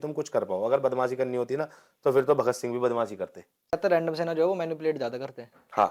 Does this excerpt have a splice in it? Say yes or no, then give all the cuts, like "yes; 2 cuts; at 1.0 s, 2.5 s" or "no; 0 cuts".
yes; 1 cut; at 3.7 s